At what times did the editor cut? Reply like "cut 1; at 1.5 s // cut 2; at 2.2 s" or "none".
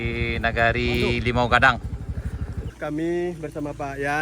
cut 1; at 2.7 s